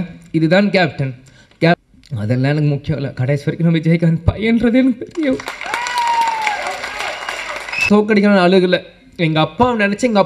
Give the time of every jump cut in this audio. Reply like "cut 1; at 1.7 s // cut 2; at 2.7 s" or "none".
cut 1; at 1.8 s // cut 2; at 7.9 s